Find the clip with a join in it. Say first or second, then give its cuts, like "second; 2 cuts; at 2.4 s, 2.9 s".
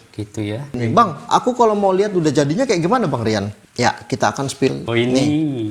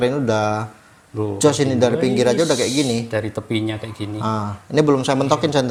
first; 3 cuts; at 0.8 s, 3.6 s, 4.8 s